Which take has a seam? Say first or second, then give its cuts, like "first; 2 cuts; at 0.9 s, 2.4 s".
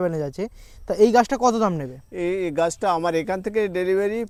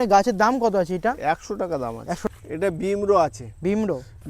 second; 1 cut; at 2.3 s